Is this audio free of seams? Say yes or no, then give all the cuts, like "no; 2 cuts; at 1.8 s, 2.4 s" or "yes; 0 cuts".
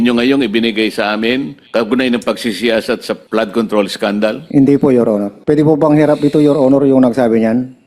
no; 4 cuts; at 1.6 s, 3.2 s, 4.4 s, 5.3 s